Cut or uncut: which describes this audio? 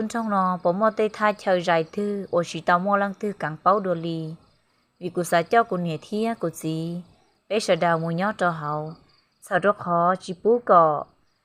uncut